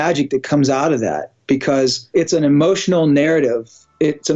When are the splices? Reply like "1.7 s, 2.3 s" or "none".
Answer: 2.1 s